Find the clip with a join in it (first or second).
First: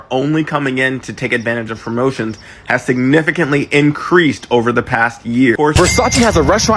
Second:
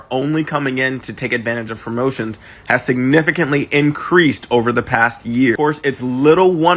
first